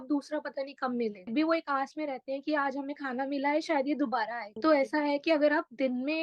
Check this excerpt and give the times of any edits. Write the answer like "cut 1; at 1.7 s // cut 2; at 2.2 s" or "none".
cut 1; at 1.3 s // cut 2; at 4.5 s